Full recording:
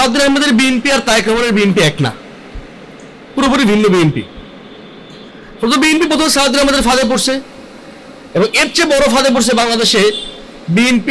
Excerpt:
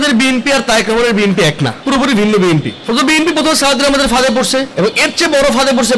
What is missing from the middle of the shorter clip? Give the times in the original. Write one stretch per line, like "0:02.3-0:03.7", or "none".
0:02.2-0:03.3
0:04.3-0:05.5
0:07.4-0:08.3